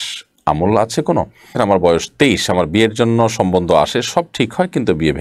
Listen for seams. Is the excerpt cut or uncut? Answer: cut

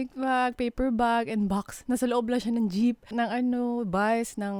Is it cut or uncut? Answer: uncut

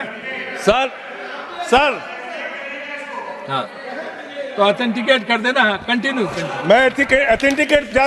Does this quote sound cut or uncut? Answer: uncut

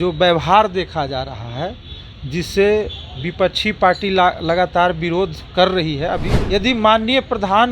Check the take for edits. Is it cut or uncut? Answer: cut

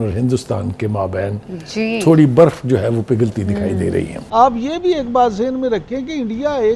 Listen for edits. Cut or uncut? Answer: cut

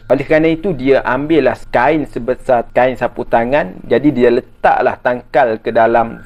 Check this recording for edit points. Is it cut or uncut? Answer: uncut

